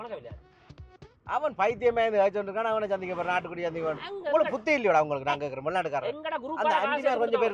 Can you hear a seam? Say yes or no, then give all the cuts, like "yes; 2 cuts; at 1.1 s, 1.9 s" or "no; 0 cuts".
no; 0 cuts